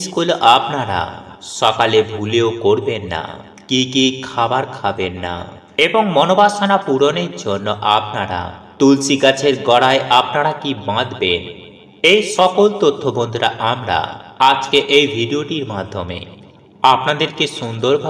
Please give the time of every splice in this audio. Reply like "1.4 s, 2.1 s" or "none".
none